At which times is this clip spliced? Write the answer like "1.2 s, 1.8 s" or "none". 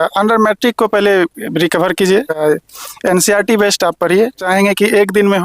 2.4 s, 4.4 s